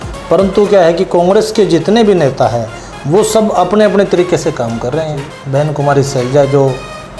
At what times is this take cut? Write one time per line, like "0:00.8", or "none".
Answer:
0:05.3